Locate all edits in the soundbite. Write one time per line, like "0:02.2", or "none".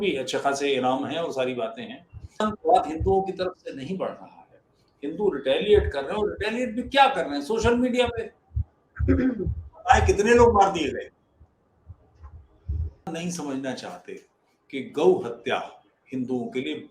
0:02.4
0:13.1